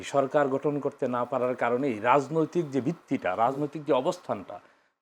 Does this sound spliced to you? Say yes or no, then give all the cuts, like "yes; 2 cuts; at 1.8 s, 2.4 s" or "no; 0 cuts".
no; 0 cuts